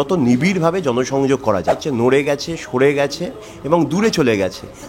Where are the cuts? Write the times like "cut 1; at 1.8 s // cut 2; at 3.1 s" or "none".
cut 1; at 1.8 s

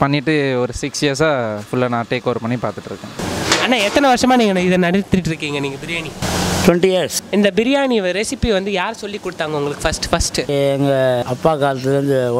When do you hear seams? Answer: cut 1; at 3.1 s // cut 2; at 6.2 s // cut 3; at 7.2 s // cut 4; at 10.5 s // cut 5; at 11.2 s

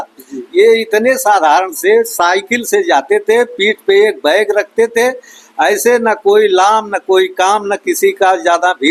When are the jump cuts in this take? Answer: none

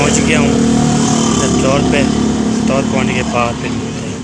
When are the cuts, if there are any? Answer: none

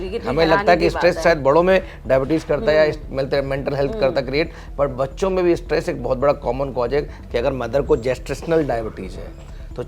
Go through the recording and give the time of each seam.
cut 1; at 7.2 s

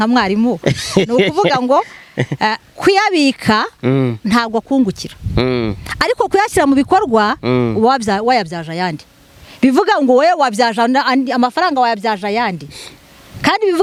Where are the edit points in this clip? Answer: none

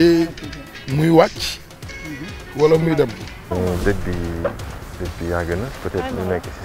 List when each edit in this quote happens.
cut 1; at 3.5 s

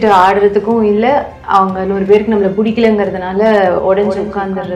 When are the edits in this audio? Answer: none

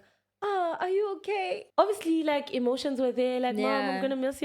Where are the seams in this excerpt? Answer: cut 1; at 1.6 s

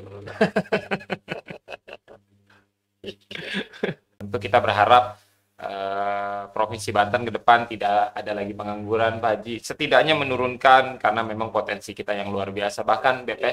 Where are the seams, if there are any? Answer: cut 1; at 4.4 s

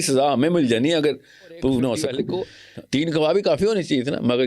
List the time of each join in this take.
cut 1; at 2.3 s

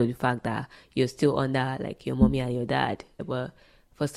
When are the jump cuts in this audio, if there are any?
cut 1; at 3.2 s

